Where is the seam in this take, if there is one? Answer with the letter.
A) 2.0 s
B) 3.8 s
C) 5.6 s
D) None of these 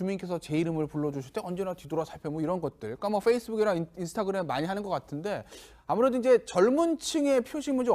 B